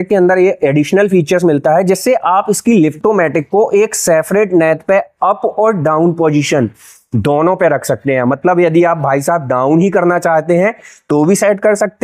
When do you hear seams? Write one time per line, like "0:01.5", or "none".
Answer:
none